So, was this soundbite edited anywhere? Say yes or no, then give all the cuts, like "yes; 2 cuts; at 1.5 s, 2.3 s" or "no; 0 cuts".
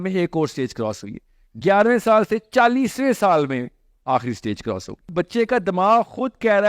yes; 1 cut; at 5.0 s